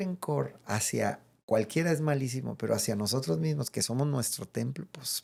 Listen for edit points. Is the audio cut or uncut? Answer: uncut